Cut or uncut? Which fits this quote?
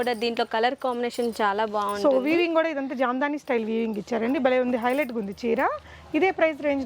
uncut